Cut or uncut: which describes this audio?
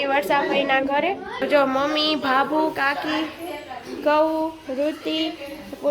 uncut